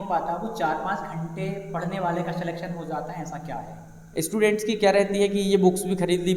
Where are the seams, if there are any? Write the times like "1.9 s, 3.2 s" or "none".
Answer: 4.0 s